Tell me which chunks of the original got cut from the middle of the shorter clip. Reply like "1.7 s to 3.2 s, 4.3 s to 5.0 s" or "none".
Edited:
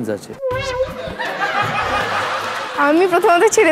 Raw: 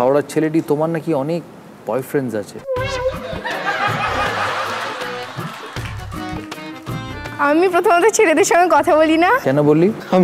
5.0 s to 7.3 s